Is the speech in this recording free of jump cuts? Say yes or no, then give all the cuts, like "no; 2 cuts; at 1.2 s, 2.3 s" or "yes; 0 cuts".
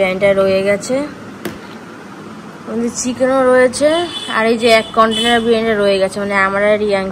yes; 0 cuts